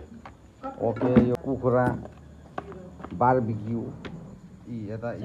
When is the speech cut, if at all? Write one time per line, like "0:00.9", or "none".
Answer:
0:01.4